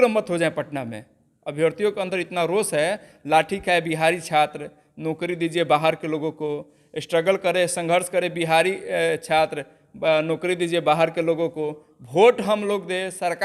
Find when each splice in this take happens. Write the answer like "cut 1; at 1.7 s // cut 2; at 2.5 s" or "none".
none